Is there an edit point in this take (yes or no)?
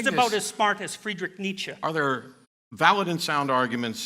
yes